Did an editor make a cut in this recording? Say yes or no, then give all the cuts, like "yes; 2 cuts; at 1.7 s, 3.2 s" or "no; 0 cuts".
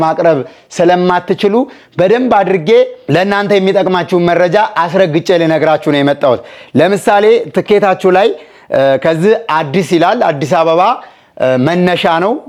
no; 0 cuts